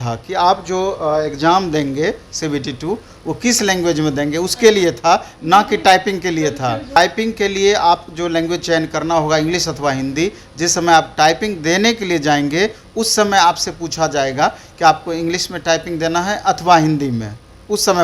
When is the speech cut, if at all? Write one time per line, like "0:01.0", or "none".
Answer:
0:07.0